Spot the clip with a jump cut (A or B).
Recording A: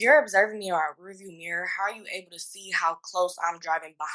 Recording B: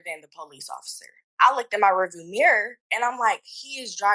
B